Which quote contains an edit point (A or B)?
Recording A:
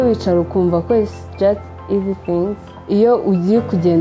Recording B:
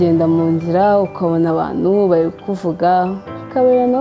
A